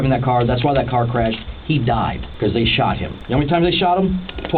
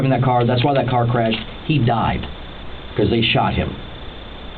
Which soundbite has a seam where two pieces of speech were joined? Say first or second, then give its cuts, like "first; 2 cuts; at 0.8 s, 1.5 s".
first; 2 cuts; at 2.2 s, 3.1 s